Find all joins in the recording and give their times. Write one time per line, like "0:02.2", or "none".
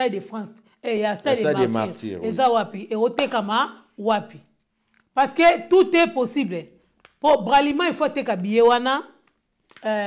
none